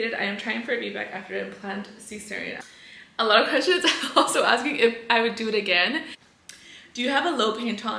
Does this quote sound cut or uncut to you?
cut